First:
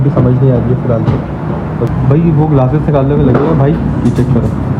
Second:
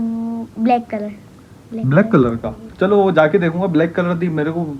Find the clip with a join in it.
first; 1 cut; at 1.9 s

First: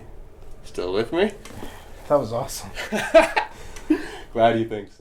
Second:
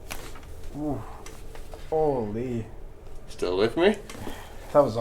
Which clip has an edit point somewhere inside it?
second; 1 cut; at 1.7 s

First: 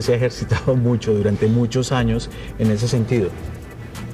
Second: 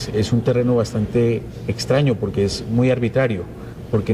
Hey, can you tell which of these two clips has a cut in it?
second; 1 cut; at 2.4 s

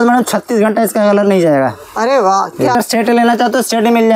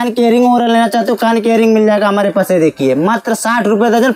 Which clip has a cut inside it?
first; 1 cut; at 2.7 s

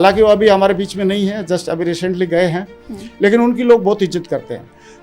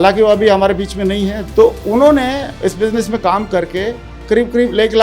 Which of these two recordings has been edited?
second; 1 cut; at 1.4 s

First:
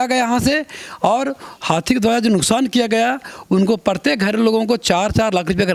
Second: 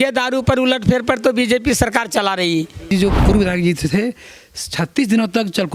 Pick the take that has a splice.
second; 1 cut; at 2.9 s

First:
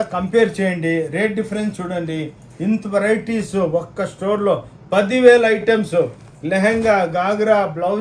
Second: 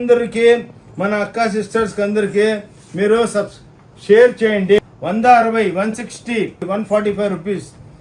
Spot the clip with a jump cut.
second; 2 cuts; at 4.8 s, 6.6 s

